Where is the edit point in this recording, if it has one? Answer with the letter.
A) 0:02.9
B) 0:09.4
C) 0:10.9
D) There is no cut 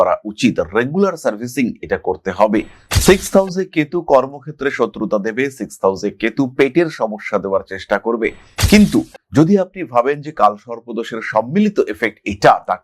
A